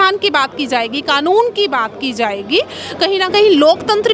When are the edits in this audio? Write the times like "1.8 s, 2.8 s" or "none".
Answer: none

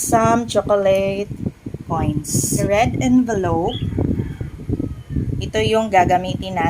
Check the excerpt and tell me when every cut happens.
2.7 s

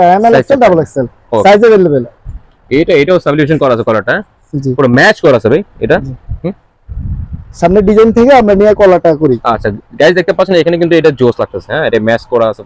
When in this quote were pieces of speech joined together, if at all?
2.2 s

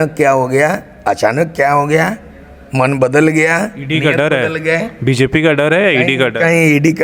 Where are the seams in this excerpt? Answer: none

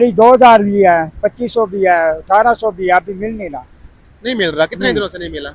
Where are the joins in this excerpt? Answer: none

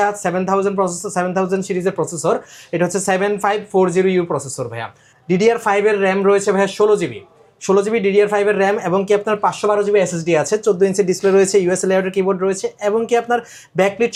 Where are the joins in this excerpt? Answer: none

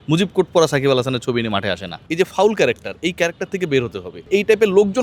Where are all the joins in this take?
2.0 s, 4.2 s

